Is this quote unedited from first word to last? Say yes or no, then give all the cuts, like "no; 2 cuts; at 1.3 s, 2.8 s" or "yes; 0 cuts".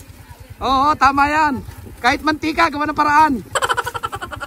no; 1 cut; at 3.5 s